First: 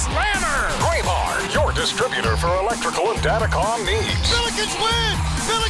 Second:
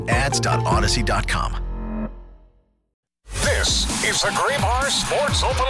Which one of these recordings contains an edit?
second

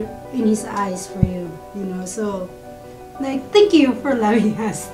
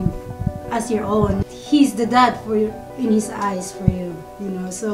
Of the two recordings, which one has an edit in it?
second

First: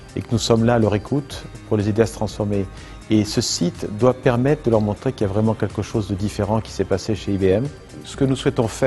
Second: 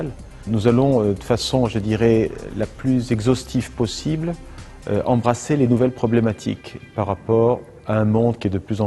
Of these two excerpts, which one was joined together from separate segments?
first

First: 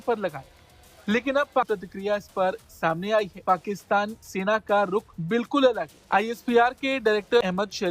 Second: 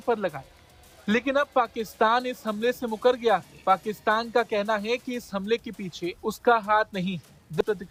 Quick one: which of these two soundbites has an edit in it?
first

